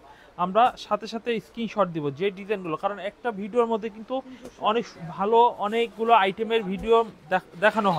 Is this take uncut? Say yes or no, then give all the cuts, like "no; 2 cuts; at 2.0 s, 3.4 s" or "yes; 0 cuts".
yes; 0 cuts